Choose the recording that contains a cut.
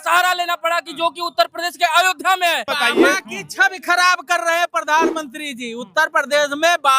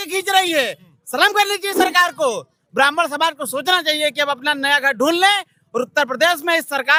first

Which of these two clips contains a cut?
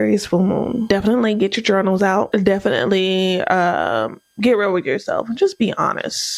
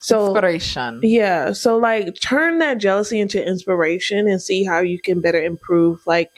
first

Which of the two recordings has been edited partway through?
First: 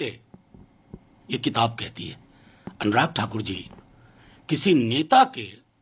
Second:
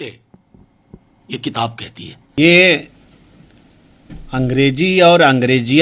second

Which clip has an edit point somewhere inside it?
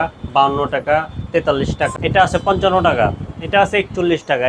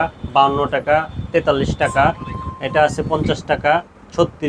first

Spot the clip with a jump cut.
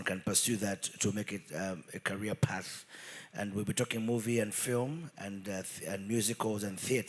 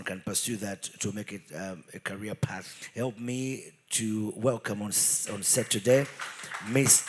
second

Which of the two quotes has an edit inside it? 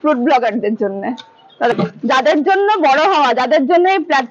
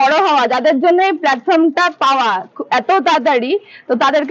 first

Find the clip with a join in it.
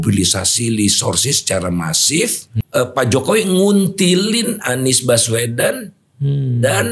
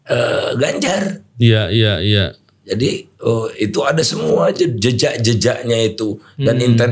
first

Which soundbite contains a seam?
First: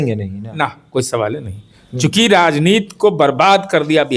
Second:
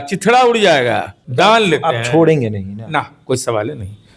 second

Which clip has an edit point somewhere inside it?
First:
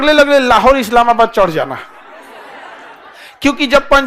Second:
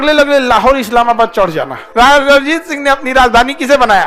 second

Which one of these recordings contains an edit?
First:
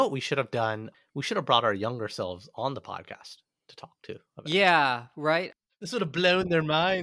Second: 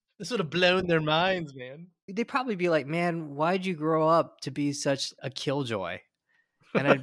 first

